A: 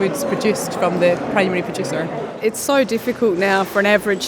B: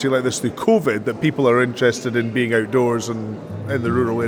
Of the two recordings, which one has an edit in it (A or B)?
A